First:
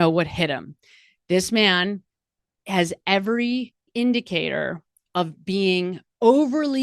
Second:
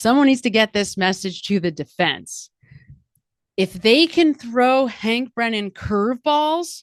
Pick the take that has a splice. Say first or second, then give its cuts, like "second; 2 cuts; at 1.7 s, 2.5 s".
first; 1 cut; at 3.9 s